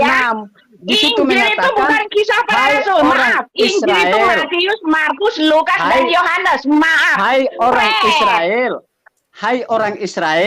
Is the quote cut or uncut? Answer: uncut